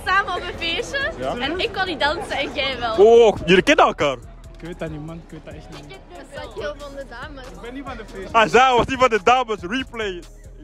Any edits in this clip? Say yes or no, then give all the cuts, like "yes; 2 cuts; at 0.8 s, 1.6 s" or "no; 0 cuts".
no; 0 cuts